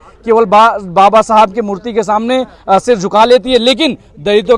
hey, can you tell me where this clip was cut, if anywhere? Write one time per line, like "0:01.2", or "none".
none